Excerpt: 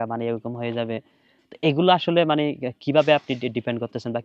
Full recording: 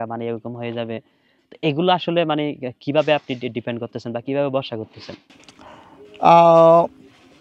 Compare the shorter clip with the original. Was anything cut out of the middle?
no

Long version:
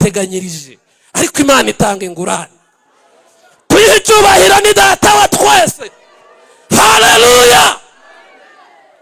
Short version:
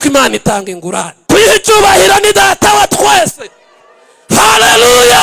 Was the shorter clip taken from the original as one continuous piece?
no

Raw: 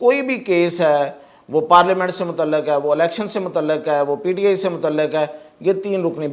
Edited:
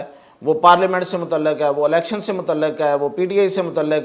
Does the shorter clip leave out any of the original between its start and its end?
no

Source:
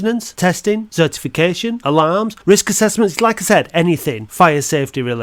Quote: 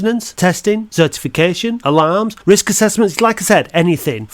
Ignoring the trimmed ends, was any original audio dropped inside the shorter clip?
no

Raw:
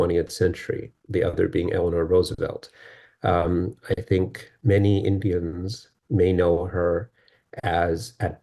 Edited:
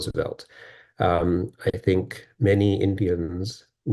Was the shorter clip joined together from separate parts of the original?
no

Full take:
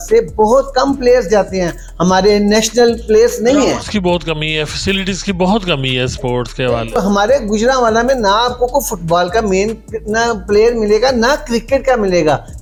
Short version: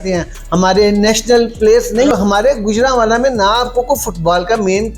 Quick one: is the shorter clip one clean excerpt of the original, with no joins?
no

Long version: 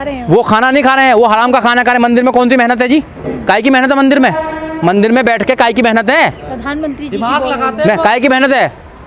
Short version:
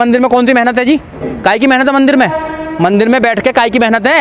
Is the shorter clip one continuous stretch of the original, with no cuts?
yes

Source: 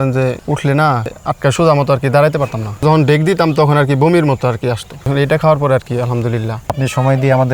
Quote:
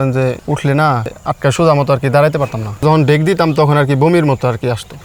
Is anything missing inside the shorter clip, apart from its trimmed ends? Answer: no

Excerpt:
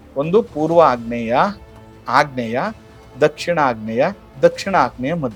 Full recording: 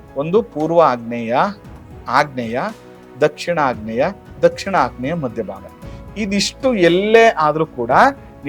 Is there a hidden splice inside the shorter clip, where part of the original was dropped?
no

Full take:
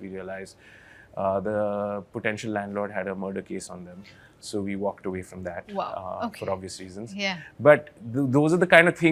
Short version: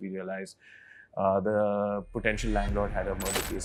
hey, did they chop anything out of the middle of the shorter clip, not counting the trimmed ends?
no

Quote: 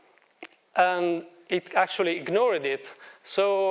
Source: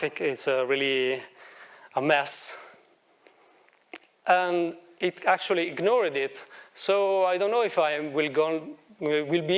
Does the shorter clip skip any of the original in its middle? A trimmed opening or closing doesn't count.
no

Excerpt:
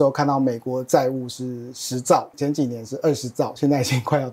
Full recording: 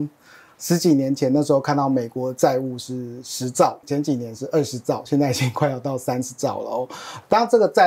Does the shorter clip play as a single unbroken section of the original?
yes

